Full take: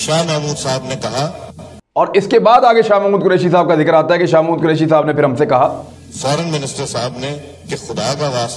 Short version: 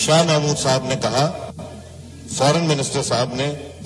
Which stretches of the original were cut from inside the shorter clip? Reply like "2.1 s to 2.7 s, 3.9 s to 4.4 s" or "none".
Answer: 1.9 s to 5.7 s

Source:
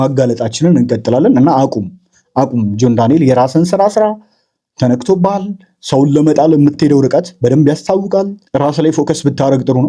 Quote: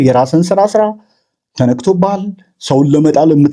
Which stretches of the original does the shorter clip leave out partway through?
none

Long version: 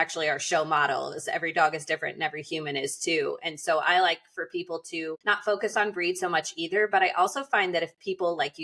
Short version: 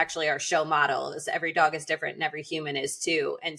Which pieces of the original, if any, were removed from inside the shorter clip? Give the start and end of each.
none

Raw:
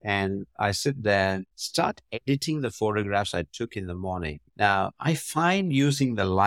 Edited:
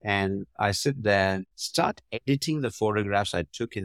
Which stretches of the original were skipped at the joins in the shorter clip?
none

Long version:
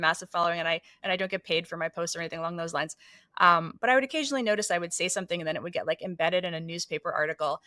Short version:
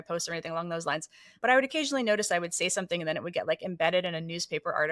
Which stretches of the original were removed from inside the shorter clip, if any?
3.2 s to 3.7 s

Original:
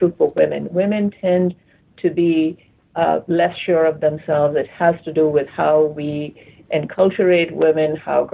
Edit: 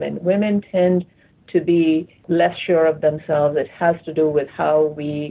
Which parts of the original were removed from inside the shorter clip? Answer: 2.7 s to 3.2 s

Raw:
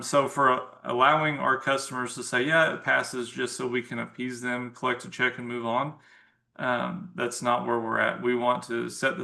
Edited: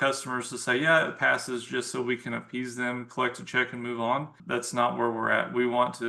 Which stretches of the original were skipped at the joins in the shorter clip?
6.0 s to 7.1 s

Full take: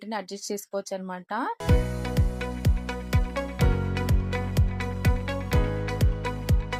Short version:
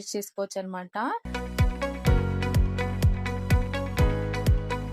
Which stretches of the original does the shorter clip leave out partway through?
1.6 s to 2.8 s

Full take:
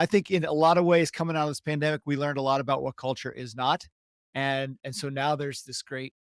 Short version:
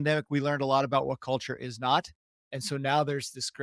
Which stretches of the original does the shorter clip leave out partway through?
4.2 s to 4.8 s

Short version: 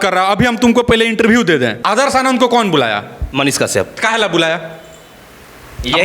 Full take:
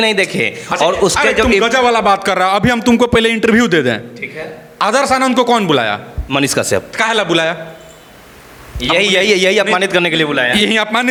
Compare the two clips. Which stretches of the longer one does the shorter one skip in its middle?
4.0 s to 4.7 s

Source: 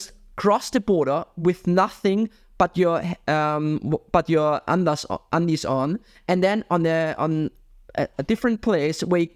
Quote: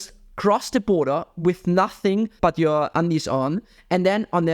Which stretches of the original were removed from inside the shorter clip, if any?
2.6 s to 4.9 s

